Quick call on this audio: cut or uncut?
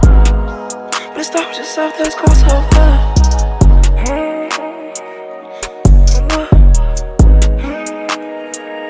uncut